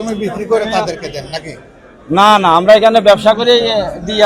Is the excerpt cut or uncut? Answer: uncut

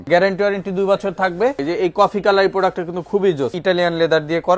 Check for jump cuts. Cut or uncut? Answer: cut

